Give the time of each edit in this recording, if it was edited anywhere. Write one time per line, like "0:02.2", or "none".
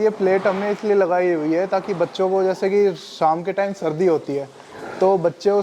none